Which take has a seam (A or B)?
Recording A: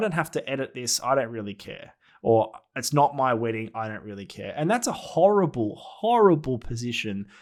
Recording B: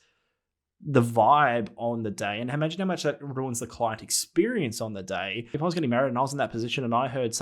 B